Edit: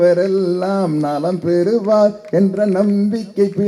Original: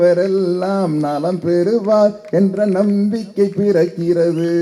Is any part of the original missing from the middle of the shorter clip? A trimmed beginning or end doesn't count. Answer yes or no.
no